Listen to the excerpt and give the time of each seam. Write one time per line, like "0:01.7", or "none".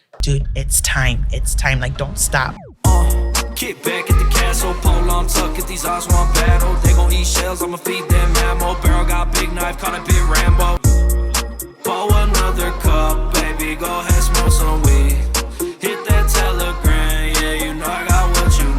0:02.6